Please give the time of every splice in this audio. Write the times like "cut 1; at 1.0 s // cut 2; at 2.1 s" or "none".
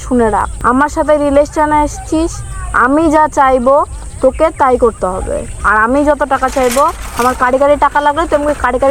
none